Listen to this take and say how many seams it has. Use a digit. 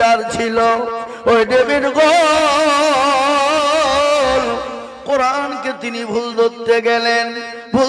0